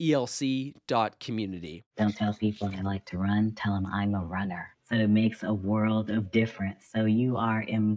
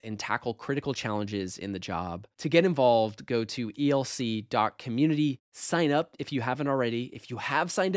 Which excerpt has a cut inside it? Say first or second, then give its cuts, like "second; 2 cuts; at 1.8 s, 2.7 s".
first; 1 cut; at 1.8 s